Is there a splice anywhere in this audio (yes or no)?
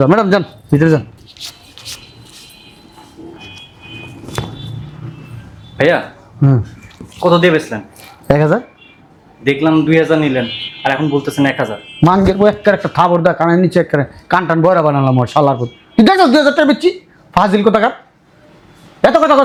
no